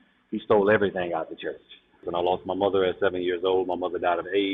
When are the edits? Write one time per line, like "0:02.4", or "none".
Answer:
0:02.0

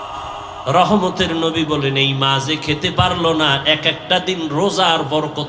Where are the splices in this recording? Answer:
none

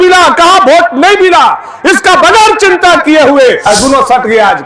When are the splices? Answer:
0:03.7

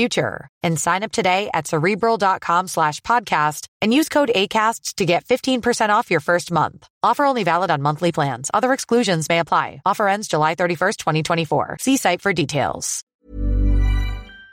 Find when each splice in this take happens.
0:13.2

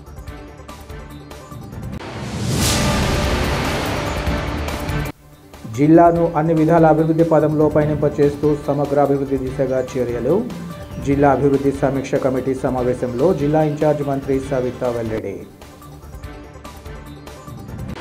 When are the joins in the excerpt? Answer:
0:04.8

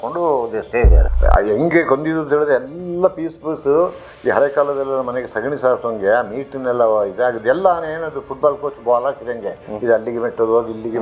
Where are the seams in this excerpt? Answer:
0:01.0

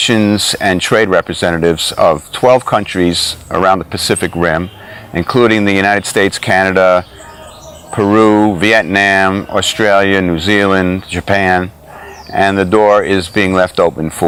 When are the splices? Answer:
none

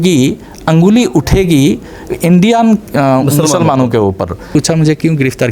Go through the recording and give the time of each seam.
0:04.5

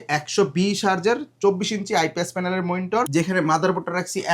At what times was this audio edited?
0:03.1

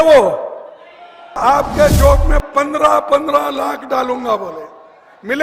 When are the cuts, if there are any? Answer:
0:01.4

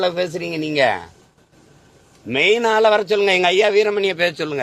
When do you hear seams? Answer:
none

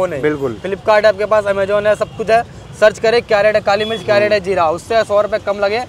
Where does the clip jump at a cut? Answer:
none

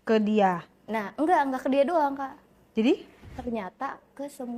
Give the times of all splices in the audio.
0:03.3

